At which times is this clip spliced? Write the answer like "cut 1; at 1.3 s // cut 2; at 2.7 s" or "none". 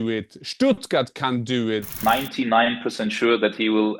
cut 1; at 1.9 s